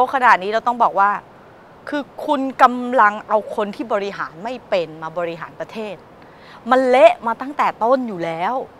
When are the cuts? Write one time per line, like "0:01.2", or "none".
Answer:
none